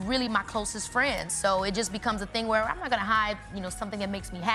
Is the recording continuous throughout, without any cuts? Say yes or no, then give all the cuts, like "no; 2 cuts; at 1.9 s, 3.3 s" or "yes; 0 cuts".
yes; 0 cuts